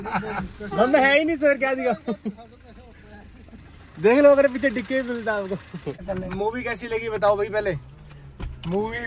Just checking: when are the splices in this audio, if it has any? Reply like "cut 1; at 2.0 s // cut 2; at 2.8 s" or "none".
cut 1; at 6.0 s

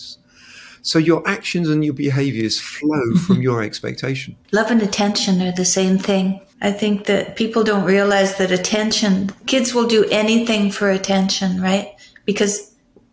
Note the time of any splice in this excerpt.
cut 1; at 4.3 s // cut 2; at 6.5 s

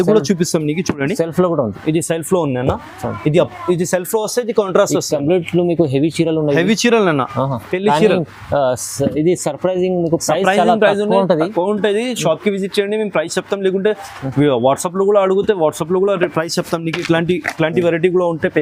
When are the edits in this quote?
none

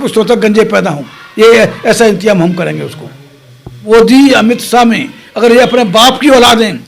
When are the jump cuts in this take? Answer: cut 1; at 3.9 s

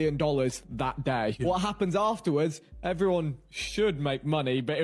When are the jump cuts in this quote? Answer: none

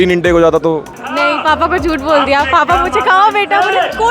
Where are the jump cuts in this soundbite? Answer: cut 1; at 1.0 s

